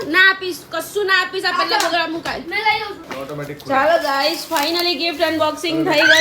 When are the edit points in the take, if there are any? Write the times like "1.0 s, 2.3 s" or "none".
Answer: 3.1 s